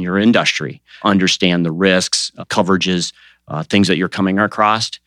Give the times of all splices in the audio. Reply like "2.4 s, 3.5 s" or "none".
0.9 s